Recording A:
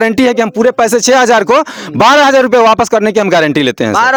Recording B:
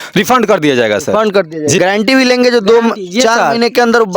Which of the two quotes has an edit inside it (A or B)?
B